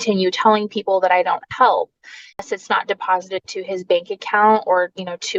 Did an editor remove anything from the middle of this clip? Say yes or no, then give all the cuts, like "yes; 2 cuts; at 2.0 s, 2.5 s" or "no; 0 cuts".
yes; 1 cut; at 2.4 s